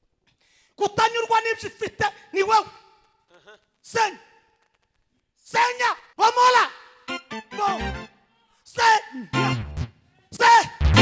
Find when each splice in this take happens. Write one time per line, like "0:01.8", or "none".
0:06.0